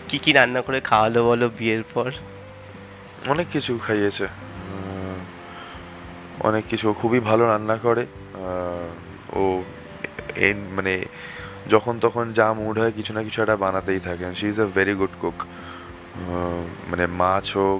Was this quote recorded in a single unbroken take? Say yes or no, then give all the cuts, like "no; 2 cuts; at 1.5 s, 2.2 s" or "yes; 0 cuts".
yes; 0 cuts